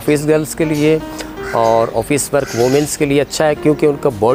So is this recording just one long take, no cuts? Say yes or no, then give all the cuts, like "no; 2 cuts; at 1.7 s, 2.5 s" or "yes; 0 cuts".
yes; 0 cuts